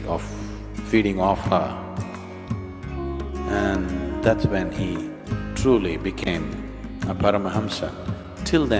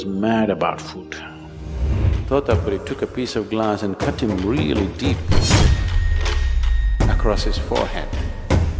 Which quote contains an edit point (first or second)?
second